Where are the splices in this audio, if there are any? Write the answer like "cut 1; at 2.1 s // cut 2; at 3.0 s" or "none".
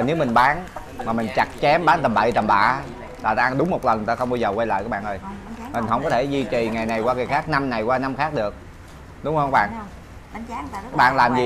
none